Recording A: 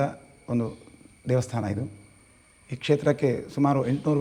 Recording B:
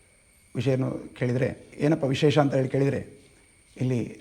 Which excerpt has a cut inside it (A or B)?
B